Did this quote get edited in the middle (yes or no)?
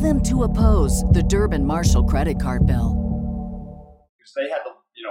yes